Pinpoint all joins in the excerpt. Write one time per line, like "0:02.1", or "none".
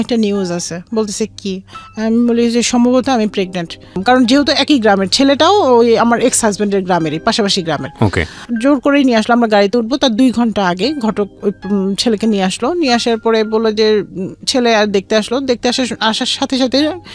0:04.0